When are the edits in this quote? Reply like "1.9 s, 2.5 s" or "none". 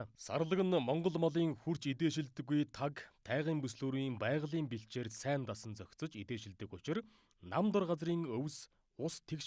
none